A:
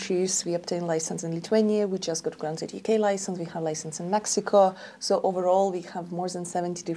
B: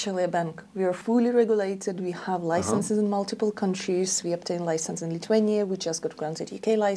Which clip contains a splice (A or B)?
B